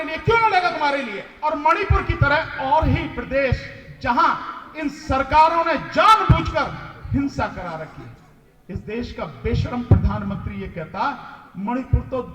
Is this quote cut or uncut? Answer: cut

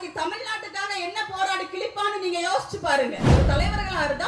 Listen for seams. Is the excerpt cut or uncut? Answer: cut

